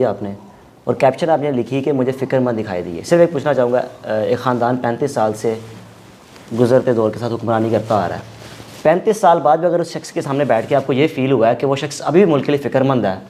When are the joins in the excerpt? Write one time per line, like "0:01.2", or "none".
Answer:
none